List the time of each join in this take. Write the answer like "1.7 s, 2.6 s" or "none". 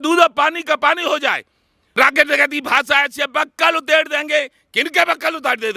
2.0 s